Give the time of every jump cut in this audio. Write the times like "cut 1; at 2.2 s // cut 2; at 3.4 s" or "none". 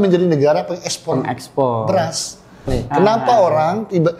cut 1; at 2.7 s